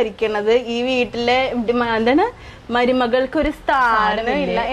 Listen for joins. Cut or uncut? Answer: uncut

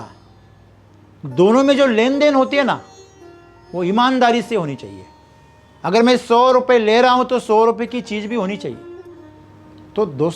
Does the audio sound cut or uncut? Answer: cut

